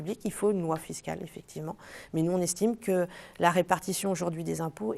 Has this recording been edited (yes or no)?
no